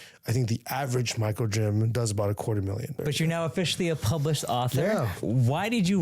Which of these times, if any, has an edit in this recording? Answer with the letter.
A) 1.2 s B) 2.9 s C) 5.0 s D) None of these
B